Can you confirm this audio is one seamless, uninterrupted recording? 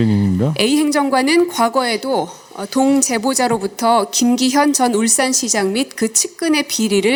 yes; 0 cuts

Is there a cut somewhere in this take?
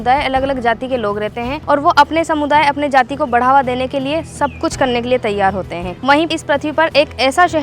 yes; 2 cuts; at 1.6 s, 6.3 s

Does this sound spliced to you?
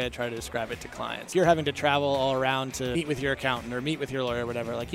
yes; 2 cuts; at 1.3 s, 2.9 s

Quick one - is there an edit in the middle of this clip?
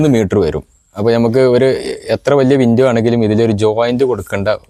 no; 0 cuts

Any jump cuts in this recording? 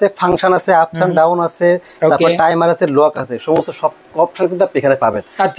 no; 0 cuts

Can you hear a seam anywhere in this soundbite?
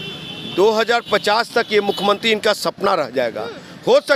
no; 0 cuts

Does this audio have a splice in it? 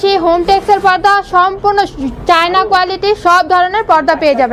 no; 0 cuts

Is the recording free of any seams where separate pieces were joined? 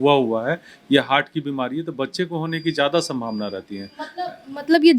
yes; 0 cuts

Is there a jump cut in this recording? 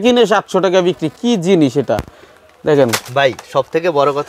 no; 0 cuts

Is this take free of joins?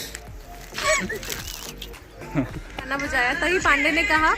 no; 1 cut; at 2.9 s

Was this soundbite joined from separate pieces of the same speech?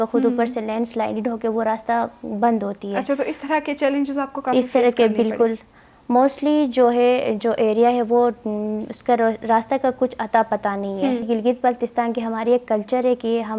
yes; 1 cut; at 11.3 s

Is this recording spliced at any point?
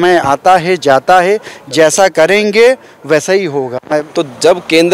yes; 1 cut; at 4.0 s

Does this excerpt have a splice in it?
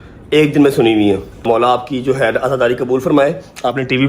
yes; 1 cut; at 1.4 s

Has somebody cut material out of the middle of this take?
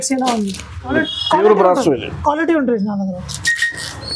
yes; 1 cut; at 0.9 s

